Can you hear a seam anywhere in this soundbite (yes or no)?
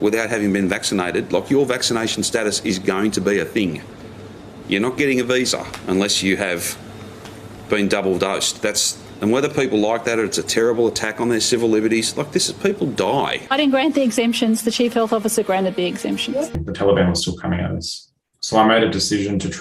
yes